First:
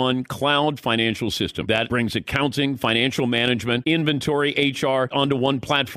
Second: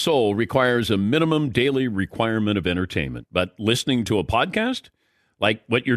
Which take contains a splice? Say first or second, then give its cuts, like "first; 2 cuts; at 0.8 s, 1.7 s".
first; 3 cuts; at 1.8 s, 3.8 s, 5.1 s